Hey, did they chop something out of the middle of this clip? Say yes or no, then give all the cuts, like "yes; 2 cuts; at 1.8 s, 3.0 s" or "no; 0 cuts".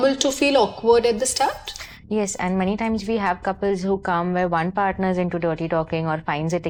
no; 0 cuts